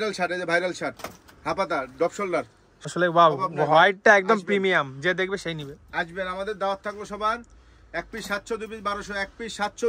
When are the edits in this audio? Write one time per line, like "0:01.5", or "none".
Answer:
0:02.9